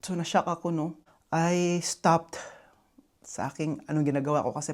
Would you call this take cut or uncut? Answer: uncut